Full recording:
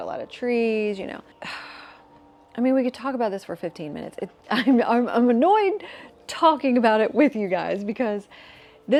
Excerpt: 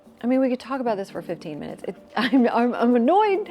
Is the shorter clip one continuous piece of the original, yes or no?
yes